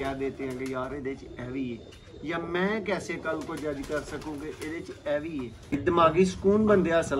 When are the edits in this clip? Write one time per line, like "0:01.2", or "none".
0:05.8